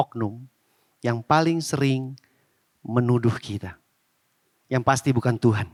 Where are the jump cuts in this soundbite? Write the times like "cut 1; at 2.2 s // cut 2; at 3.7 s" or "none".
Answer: none